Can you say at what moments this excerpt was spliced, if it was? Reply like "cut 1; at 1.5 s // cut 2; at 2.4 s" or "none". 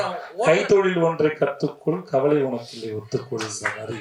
none